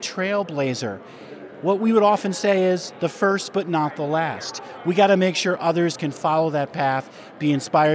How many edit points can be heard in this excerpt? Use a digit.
0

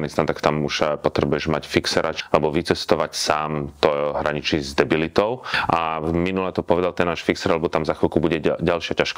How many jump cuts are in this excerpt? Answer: 2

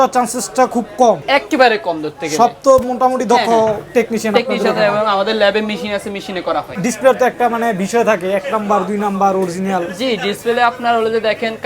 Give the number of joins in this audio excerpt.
2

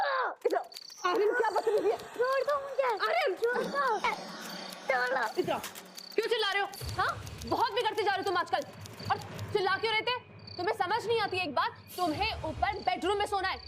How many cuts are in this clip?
0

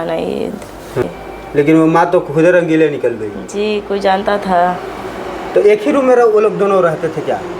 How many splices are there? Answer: 1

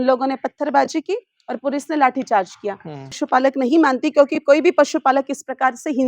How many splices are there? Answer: 1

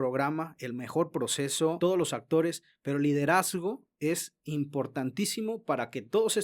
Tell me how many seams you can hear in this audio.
1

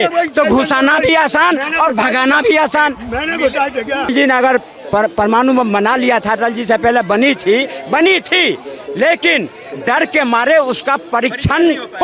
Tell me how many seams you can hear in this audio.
1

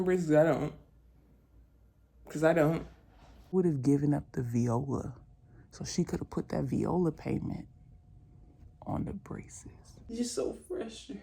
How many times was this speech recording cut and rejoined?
2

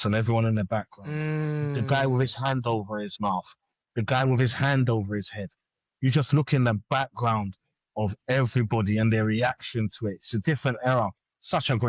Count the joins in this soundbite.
0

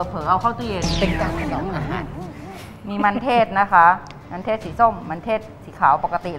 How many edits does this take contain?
0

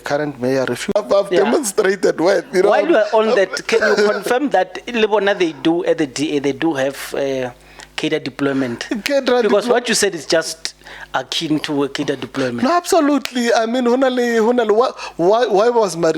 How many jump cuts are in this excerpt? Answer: 1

